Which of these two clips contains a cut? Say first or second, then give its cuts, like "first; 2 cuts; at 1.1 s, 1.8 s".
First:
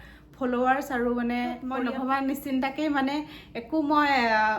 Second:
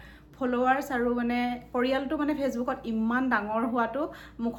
first; 1 cut; at 1.7 s